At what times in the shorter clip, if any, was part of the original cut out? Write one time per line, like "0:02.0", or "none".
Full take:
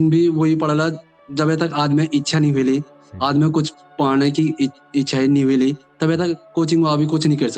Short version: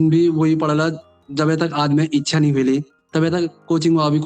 0:03.0